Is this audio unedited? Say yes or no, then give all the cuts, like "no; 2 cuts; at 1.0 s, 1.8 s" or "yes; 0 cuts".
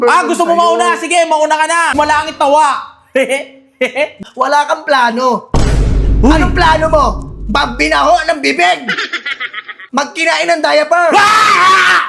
no; 2 cuts; at 1.9 s, 4.2 s